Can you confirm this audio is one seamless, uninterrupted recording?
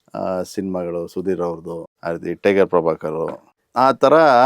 no; 1 cut; at 1.9 s

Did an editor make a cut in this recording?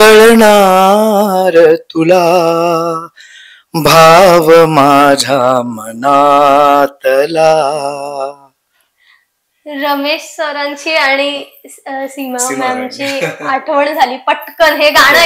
no; 0 cuts

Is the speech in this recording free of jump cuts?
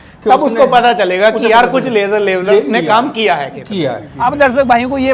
no; 1 cut; at 4.1 s

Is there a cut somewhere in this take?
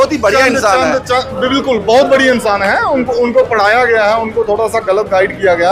no; 0 cuts

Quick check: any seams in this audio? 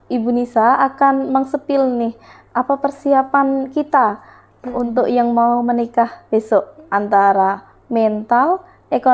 no; 0 cuts

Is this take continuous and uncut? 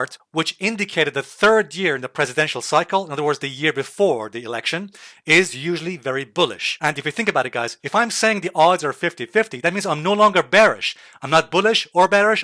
no; 1 cut; at 6.7 s

